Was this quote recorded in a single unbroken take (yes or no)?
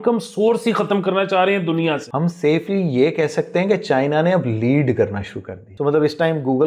no